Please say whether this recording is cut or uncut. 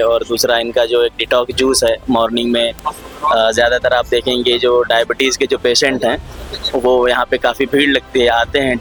uncut